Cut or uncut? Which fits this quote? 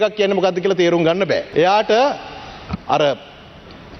cut